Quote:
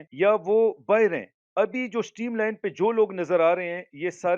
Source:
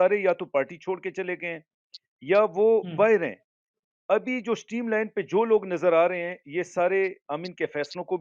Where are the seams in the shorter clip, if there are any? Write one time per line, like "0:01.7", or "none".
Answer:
0:01.4